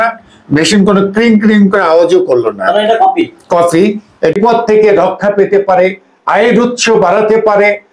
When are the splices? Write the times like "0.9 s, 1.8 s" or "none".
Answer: 4.3 s